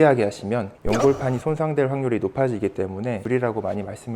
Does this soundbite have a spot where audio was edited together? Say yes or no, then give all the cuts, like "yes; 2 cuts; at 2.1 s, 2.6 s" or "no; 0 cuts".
no; 0 cuts